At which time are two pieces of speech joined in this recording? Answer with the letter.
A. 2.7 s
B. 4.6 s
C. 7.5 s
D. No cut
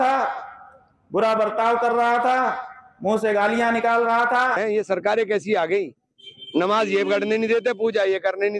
B